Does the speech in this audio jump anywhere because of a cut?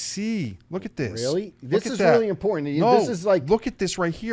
no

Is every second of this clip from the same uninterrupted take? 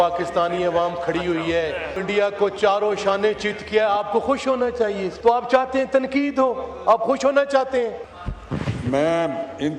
no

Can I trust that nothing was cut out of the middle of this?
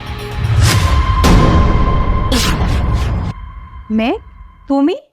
no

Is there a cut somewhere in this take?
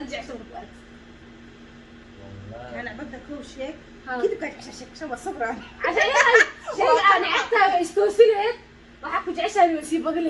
no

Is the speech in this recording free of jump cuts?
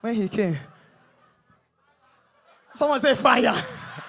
yes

